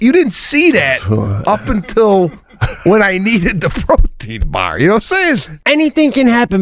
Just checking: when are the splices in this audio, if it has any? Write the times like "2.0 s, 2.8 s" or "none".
5.5 s